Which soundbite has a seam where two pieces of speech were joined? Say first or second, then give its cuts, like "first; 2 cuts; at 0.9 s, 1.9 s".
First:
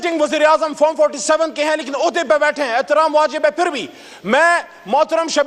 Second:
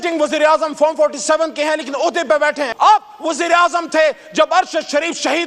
second; 1 cut; at 2.7 s